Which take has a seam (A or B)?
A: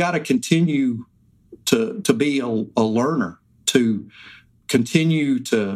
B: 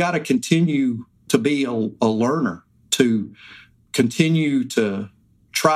B